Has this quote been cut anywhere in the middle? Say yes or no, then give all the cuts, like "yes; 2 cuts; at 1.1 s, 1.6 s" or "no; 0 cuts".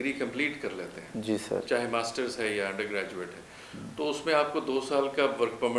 no; 0 cuts